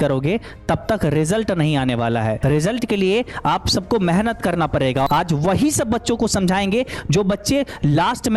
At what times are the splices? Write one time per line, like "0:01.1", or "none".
0:02.4
0:05.1